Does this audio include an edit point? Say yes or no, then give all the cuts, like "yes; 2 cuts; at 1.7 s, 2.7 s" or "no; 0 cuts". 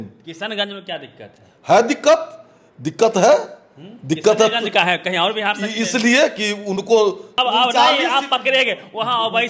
yes; 1 cut; at 7.4 s